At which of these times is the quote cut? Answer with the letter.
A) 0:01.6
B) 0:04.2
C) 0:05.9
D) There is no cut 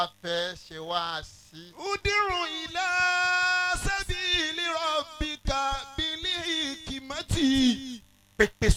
D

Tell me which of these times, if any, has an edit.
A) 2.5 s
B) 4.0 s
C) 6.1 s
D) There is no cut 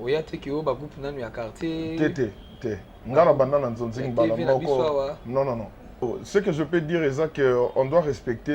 C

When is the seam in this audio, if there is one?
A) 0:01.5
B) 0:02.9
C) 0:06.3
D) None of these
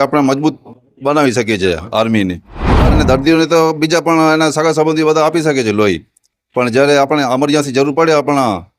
B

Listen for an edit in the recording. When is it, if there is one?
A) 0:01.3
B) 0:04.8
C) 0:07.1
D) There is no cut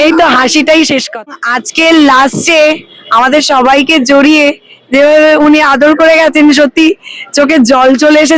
A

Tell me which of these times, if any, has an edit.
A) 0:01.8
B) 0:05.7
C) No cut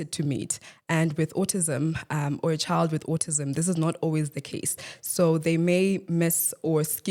C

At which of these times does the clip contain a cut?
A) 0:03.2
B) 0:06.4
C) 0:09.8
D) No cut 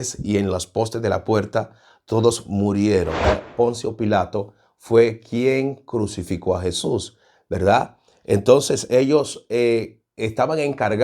A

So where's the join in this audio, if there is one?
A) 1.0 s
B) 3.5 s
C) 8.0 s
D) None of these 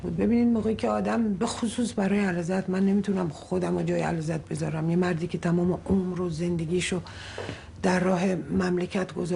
C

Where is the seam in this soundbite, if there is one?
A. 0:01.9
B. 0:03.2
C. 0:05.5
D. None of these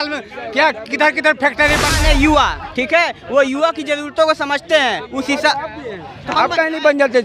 A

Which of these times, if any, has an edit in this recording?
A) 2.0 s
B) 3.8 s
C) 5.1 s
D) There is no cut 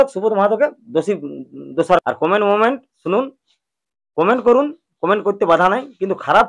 A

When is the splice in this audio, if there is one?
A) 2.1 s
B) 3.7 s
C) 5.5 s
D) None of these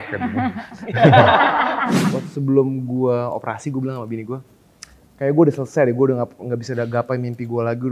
A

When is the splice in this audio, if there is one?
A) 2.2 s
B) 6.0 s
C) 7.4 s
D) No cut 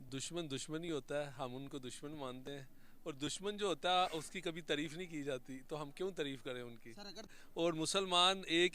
C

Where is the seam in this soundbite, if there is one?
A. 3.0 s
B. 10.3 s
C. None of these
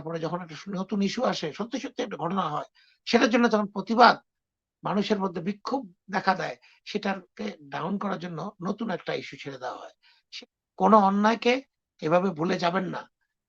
B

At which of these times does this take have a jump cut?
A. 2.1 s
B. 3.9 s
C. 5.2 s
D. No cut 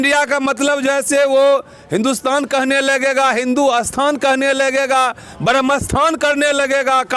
D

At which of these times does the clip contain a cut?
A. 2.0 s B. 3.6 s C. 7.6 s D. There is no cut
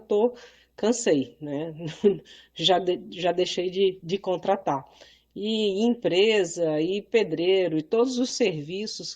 B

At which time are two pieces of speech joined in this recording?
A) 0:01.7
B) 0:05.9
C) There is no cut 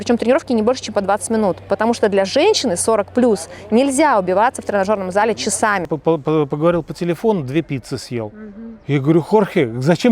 B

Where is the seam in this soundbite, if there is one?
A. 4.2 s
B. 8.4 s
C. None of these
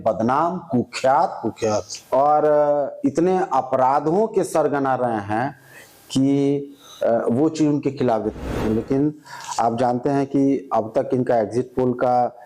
B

